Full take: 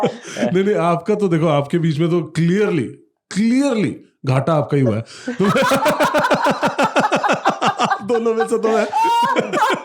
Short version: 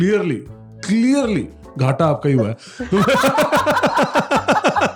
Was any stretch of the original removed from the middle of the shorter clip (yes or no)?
no